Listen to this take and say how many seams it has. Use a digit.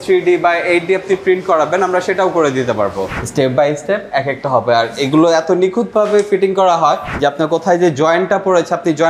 2